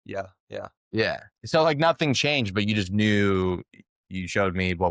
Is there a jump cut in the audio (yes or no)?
yes